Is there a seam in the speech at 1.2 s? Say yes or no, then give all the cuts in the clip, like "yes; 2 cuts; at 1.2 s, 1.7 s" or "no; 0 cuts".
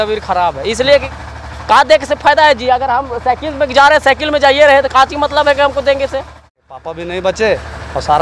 yes; 2 cuts; at 1.2 s, 6.5 s